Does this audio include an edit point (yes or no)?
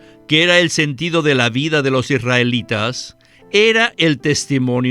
no